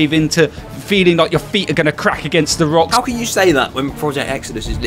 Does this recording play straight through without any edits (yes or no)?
no